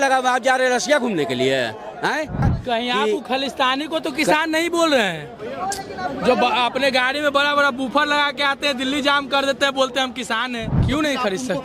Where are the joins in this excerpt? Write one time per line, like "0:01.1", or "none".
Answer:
0:02.5
0:10.7